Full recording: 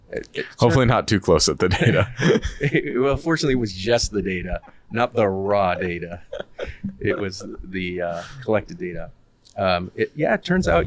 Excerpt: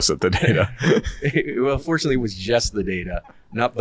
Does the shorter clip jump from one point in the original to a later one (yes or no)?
no